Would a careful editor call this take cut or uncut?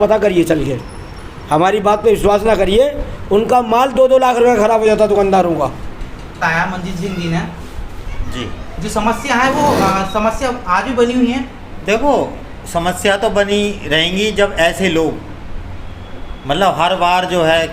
cut